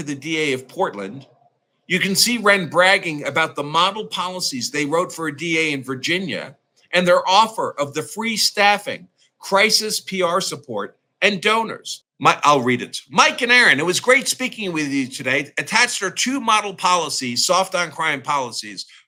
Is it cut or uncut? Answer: uncut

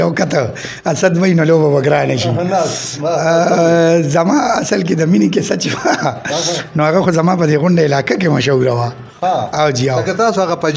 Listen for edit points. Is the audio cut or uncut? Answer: uncut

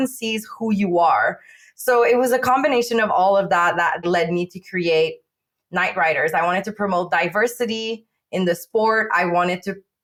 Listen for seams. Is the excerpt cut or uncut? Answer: uncut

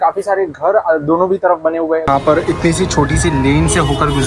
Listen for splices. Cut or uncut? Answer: cut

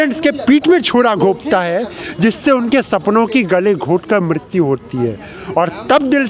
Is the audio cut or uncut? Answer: uncut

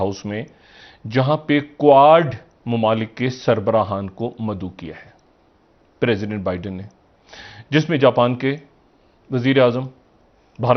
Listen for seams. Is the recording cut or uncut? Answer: uncut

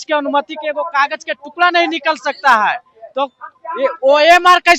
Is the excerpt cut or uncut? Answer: uncut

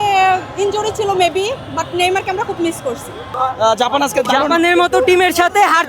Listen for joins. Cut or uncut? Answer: cut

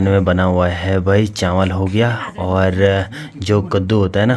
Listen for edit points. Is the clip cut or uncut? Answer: uncut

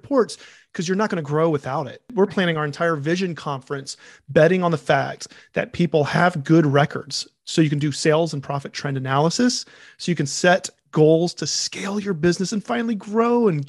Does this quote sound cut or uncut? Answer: cut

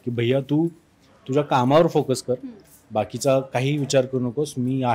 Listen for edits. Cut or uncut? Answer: uncut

